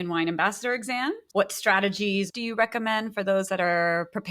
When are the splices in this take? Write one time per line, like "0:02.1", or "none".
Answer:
0:01.3
0:02.3